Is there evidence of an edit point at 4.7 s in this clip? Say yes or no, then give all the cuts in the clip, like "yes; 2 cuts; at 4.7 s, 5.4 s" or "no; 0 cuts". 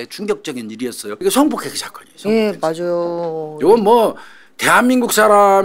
no; 1 cut; at 1.2 s